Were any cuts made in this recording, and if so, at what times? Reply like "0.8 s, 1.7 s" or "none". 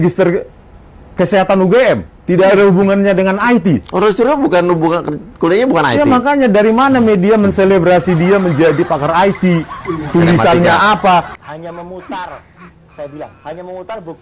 11.3 s